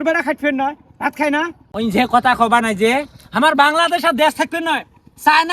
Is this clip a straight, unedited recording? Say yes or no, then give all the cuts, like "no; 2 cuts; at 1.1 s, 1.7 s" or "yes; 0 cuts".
no; 1 cut; at 1.6 s